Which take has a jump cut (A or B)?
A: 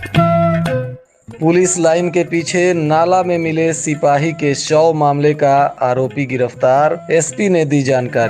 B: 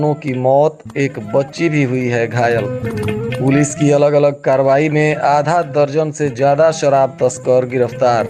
A